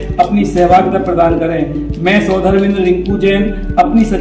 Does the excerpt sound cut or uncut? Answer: uncut